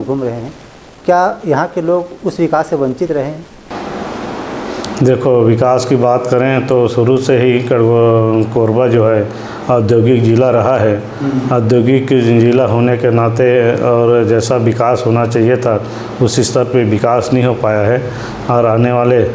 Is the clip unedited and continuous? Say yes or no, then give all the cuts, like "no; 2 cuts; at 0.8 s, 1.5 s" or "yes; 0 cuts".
yes; 0 cuts